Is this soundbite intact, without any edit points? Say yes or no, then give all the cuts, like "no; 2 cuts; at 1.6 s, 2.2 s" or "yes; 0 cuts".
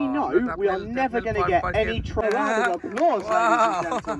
no; 1 cut; at 2.2 s